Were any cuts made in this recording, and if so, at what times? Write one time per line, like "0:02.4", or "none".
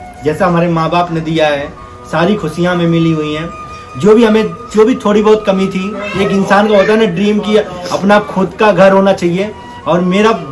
none